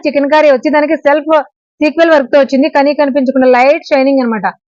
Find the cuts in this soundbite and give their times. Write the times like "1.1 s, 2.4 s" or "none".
none

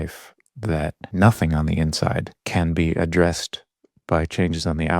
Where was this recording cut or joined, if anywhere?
1.0 s, 2.3 s

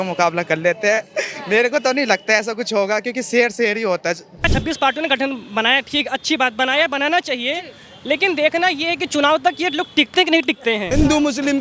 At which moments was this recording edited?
4.3 s, 10.8 s

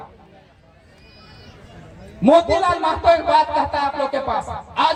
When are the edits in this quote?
none

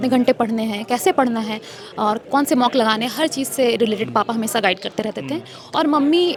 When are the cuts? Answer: none

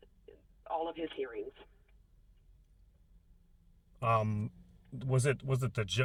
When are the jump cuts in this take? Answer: none

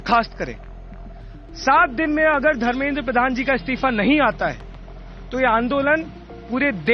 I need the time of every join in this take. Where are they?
none

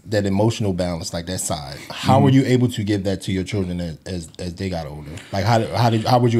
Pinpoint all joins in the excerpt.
none

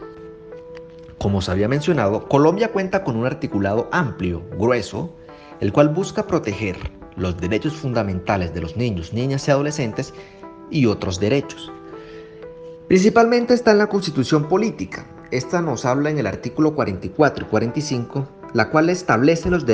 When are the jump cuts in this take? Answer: 1.1 s, 11.4 s, 12.9 s

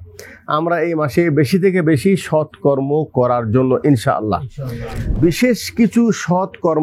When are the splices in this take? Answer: 5.1 s

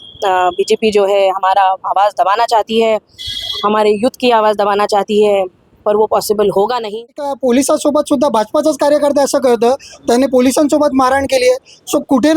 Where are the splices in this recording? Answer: 7.3 s

